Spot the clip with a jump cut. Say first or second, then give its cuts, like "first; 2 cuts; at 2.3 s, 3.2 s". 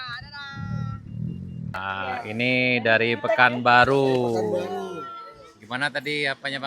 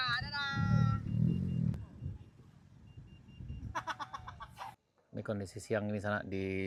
first; 1 cut; at 1.7 s